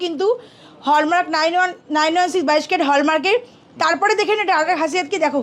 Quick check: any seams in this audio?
no; 0 cuts

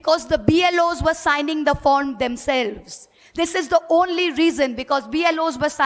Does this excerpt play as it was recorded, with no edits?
yes; 0 cuts

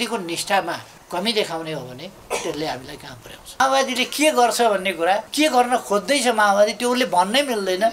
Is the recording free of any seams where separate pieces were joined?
no; 4 cuts; at 0.9 s, 2.1 s, 3.6 s, 5.3 s

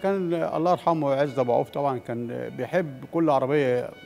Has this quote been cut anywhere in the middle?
no; 0 cuts

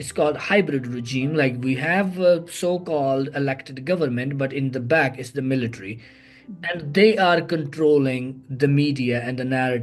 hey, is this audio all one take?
yes; 0 cuts

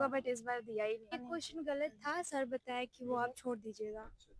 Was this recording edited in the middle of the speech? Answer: no; 0 cuts

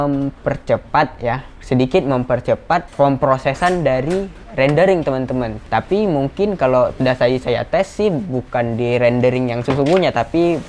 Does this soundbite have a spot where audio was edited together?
yes; 3 cuts; at 2.9 s, 5.6 s, 9.6 s

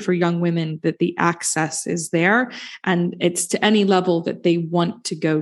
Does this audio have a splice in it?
no; 0 cuts

